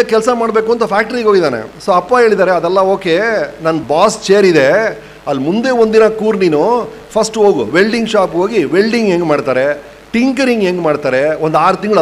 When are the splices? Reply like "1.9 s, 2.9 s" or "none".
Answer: 1.7 s, 3.8 s